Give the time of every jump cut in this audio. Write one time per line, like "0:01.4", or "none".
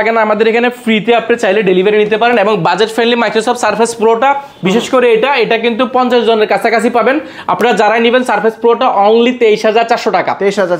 none